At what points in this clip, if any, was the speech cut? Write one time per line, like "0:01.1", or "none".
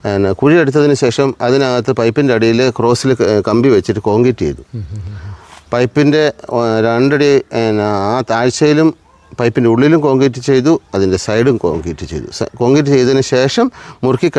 none